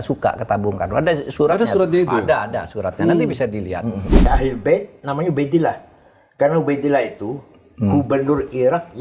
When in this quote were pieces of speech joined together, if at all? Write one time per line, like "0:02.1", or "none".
0:04.3